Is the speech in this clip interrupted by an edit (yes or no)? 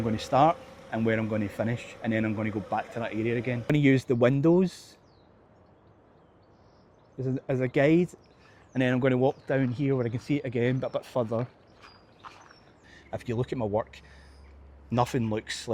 yes